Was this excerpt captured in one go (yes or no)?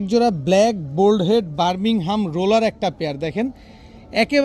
yes